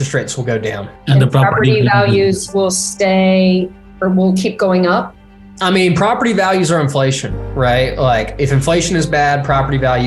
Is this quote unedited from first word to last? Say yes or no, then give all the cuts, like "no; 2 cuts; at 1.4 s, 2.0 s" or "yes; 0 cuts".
no; 1 cut; at 0.9 s